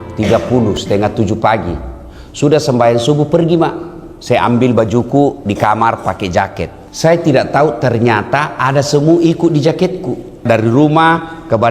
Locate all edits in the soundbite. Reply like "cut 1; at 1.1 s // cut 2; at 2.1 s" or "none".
cut 1; at 6.8 s // cut 2; at 10.4 s